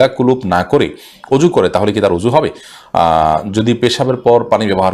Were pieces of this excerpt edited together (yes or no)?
no